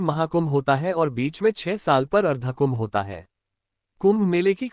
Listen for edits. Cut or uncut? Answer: uncut